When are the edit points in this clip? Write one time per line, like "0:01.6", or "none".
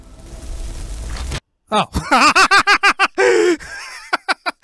0:01.5